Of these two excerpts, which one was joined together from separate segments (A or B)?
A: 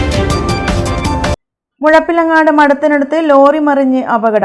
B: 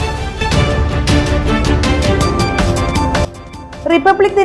A